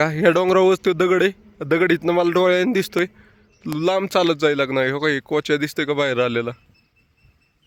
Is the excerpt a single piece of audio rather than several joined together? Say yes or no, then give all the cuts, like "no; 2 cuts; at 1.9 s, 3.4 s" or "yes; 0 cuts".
yes; 0 cuts